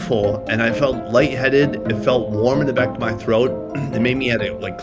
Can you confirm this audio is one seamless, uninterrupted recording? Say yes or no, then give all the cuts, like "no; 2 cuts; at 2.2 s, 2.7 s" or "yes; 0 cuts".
yes; 0 cuts